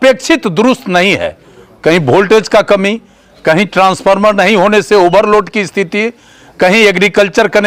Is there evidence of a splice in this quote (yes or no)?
no